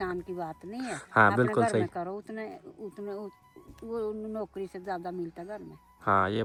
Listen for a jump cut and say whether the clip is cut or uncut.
uncut